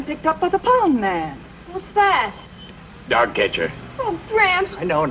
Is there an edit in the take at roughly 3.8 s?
no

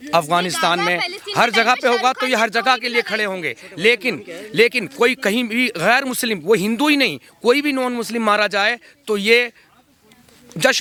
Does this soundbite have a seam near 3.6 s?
no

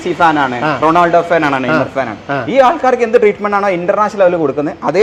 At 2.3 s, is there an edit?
no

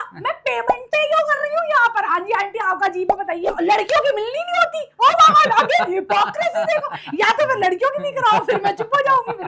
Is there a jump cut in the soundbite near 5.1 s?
no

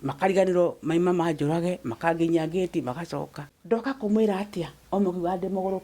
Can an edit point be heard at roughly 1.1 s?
no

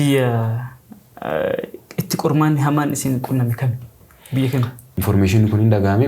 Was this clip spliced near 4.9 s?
yes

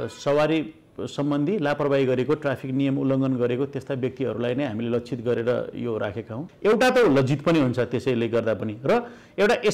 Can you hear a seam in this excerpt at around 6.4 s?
yes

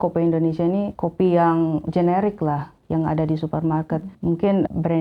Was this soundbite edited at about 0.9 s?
yes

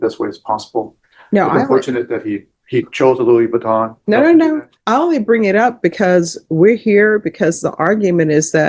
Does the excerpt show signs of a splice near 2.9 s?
no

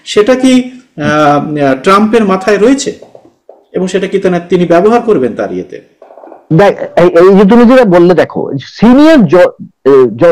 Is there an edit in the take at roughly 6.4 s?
no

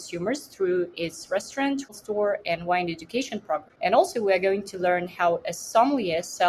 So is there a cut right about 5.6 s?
no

